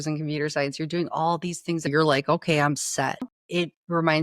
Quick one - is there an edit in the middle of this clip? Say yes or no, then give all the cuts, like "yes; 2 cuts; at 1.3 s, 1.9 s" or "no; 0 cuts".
yes; 2 cuts; at 1.9 s, 3.3 s